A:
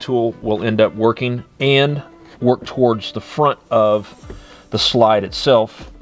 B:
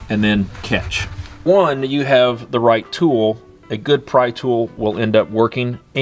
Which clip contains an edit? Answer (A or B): B